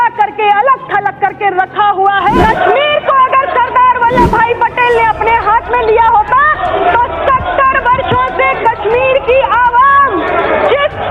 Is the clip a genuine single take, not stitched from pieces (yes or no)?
no